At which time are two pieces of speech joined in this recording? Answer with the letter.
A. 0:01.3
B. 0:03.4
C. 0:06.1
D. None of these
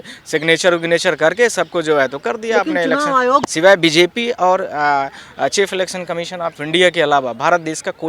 B